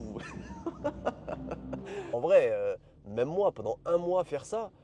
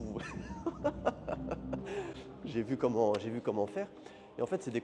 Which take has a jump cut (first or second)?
first